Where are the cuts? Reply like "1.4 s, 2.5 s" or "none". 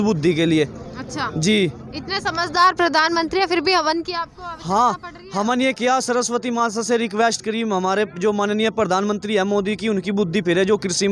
none